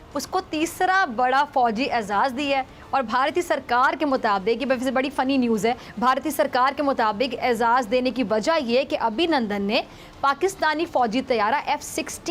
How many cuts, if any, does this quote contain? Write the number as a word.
zero